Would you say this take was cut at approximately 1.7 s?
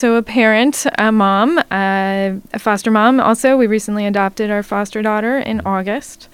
no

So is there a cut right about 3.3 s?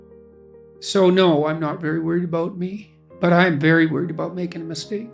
no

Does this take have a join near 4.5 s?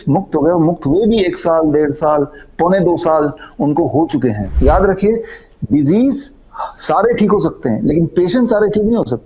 yes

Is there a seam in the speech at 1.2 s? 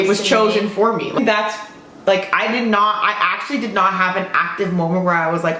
yes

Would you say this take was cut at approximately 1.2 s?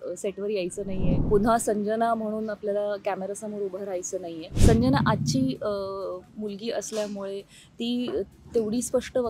yes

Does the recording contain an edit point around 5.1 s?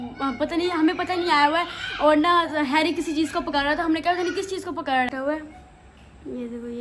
yes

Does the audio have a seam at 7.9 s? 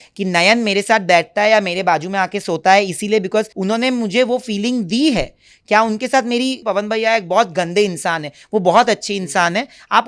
no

